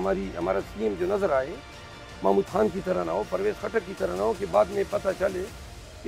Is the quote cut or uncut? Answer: uncut